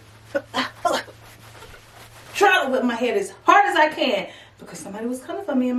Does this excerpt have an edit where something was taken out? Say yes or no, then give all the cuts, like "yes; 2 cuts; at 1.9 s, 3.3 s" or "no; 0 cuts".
no; 0 cuts